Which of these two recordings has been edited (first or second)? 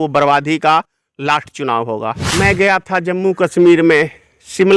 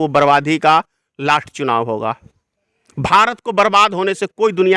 first